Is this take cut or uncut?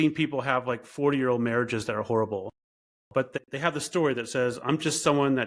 cut